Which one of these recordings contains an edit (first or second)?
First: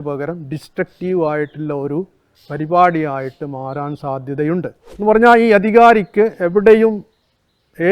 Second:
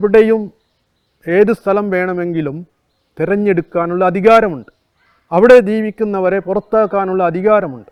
first